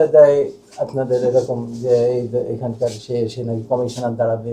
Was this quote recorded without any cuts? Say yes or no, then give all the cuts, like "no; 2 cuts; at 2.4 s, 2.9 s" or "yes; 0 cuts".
yes; 0 cuts